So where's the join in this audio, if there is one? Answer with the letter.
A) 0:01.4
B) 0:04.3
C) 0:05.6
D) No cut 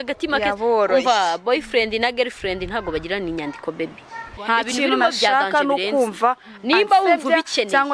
B